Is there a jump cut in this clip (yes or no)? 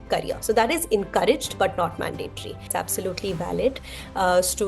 yes